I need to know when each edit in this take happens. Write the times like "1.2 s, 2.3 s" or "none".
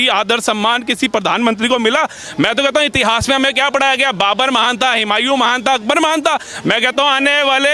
2.2 s